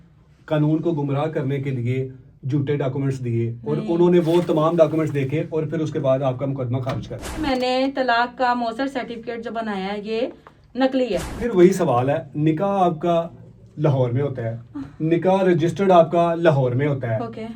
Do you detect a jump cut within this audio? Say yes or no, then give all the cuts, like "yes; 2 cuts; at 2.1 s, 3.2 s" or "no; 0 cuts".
yes; 2 cuts; at 7.4 s, 11.4 s